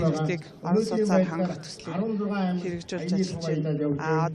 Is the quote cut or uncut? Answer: cut